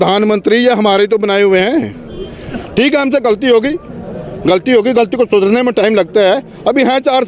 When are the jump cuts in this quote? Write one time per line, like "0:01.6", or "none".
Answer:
none

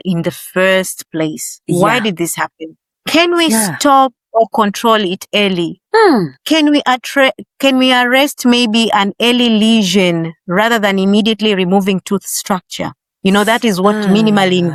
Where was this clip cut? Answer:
none

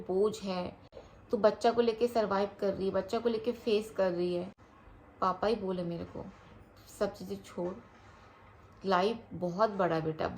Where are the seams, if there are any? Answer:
none

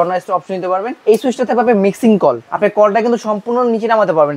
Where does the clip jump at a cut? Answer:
0:00.9
0:02.5

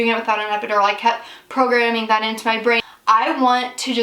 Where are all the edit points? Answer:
0:02.8

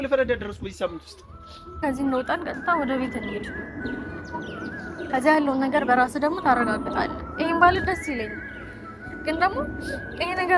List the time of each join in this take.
0:01.7

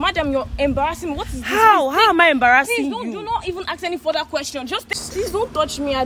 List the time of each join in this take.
0:04.9

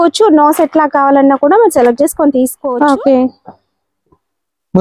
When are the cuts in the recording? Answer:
0:02.6

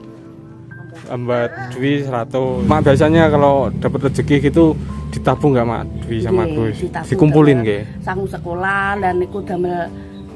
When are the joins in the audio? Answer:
0:02.6

